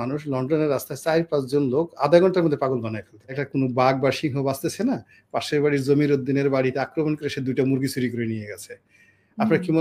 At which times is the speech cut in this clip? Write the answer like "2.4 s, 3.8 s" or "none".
3.4 s

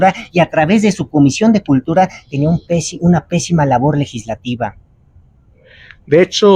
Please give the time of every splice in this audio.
none

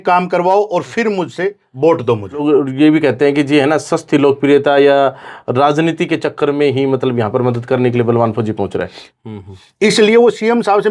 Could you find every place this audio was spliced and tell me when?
2.4 s, 9.0 s

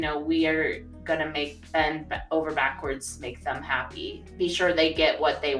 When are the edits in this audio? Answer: 4.2 s

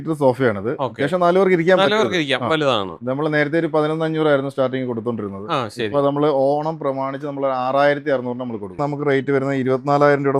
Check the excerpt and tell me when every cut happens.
8.8 s

